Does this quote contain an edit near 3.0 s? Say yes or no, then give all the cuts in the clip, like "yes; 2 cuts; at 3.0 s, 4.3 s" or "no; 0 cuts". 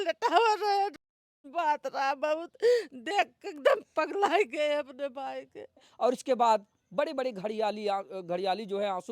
no; 1 cut; at 5.6 s